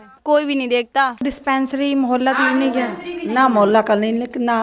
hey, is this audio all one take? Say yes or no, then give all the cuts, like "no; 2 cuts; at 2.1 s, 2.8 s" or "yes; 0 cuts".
no; 1 cut; at 1.1 s